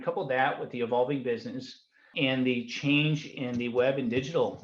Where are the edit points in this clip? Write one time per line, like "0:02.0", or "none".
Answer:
0:02.1